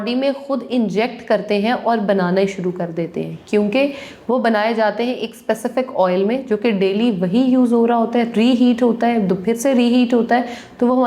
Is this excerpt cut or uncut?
uncut